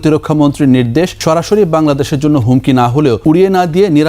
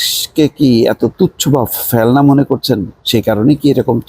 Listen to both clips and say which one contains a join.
first; 2 cuts; at 1.2 s, 3.2 s

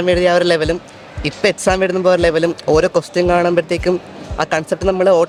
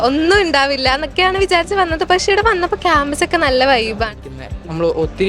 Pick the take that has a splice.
second; 1 cut; at 4.1 s

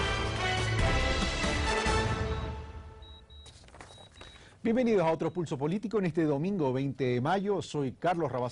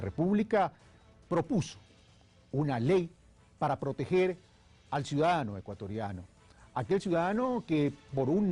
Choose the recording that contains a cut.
second; 1 cut; at 3.4 s

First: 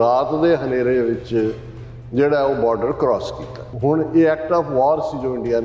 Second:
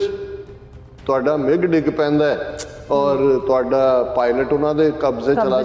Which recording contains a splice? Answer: first; 1 cut; at 3.7 s

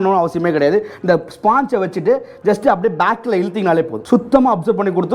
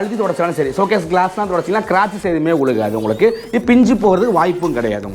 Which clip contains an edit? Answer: first; 1 cut; at 4.0 s

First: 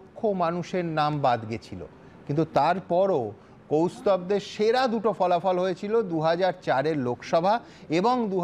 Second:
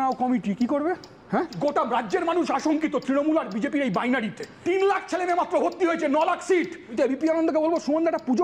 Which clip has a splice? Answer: second; 3 cuts; at 1.5 s, 4.5 s, 6.9 s

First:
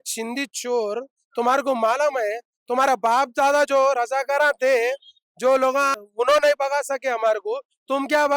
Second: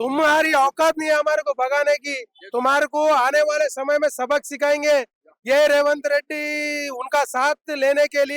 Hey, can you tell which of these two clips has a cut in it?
first; 1 cut; at 5.9 s

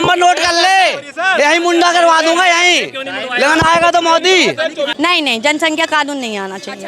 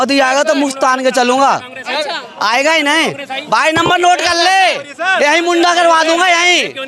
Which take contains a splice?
first; 1 cut; at 4.9 s

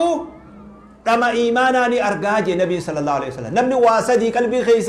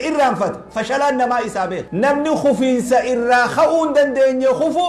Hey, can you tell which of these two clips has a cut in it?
second; 1 cut; at 1.8 s

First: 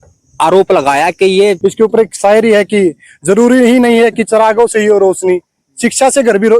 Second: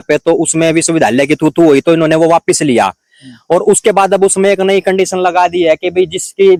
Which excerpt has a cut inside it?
first; 1 cut; at 1.6 s

